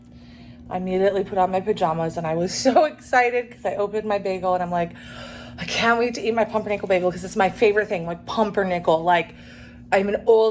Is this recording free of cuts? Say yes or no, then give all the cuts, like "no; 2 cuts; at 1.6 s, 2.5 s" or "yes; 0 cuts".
yes; 0 cuts